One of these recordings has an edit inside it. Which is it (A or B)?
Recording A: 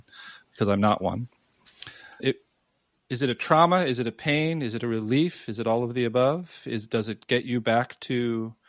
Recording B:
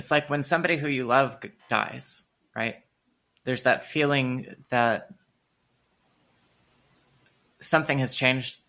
B